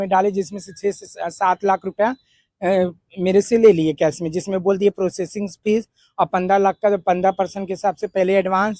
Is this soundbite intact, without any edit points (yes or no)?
yes